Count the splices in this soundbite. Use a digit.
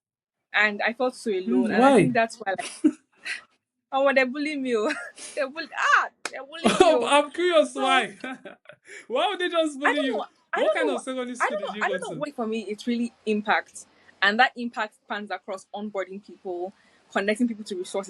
1